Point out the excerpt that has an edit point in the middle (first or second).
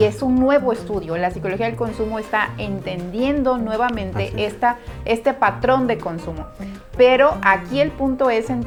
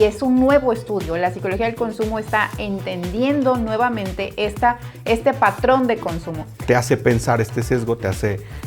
second